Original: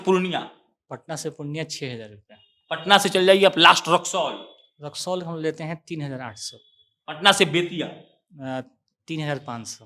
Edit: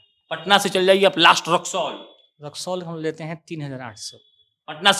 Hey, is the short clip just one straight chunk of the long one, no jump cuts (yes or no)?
yes